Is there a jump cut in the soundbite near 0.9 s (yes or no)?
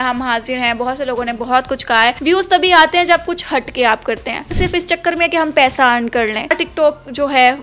no